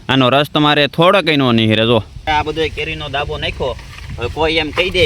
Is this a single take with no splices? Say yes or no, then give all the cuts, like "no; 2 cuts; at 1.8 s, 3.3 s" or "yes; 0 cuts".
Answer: no; 1 cut; at 2.2 s